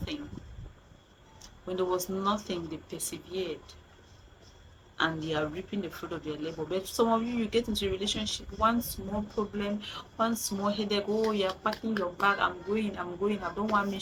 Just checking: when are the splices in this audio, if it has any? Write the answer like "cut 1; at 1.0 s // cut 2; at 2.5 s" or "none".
none